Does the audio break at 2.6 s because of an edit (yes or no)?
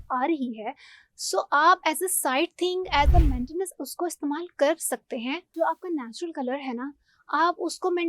no